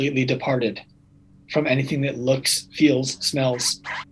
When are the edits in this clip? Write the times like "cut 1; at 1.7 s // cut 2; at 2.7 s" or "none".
none